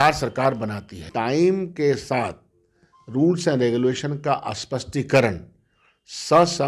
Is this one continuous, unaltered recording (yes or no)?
no